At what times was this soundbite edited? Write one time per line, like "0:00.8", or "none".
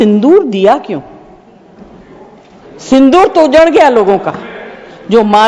none